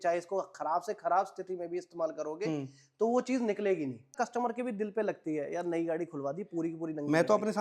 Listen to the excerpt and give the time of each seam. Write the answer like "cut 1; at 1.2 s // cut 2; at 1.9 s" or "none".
cut 1; at 4.2 s

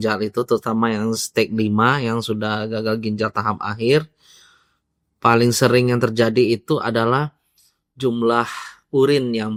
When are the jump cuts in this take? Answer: none

